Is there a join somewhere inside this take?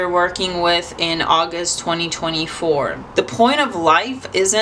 yes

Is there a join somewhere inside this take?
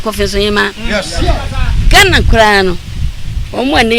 no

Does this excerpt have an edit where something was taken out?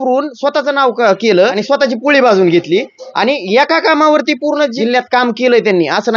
yes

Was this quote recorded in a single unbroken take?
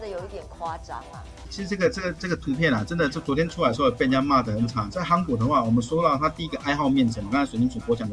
no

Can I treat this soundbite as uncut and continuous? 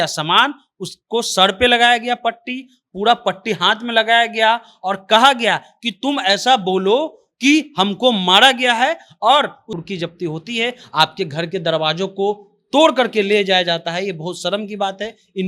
no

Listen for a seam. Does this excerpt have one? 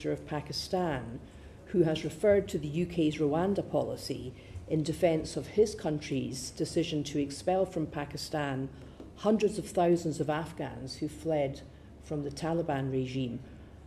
no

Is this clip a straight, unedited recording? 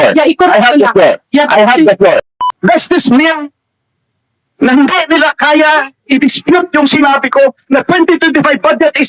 no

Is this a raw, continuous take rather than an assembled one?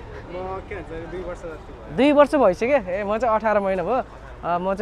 yes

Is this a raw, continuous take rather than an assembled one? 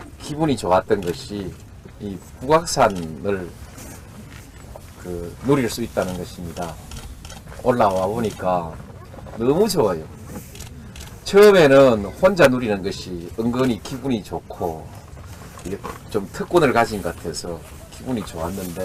yes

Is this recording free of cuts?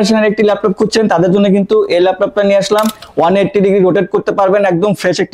no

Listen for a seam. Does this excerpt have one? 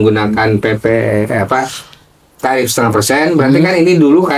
no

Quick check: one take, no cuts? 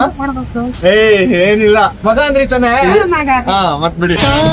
no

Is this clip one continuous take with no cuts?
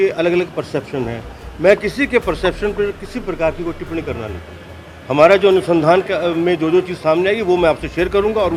yes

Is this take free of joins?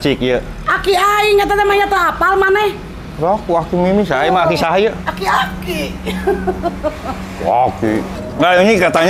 no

